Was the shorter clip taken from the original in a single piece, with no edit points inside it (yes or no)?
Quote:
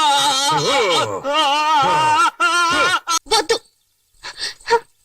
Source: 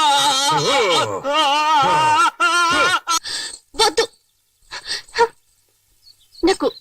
no